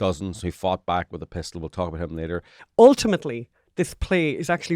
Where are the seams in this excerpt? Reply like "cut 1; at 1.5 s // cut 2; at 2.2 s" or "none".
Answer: cut 1; at 2.6 s